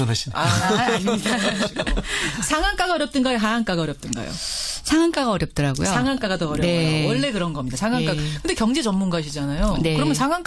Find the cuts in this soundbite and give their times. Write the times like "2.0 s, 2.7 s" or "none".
6.9 s